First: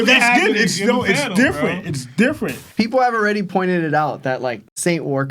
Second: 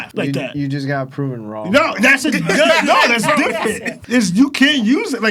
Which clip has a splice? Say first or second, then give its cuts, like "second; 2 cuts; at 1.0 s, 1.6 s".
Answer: first; 1 cut; at 2.6 s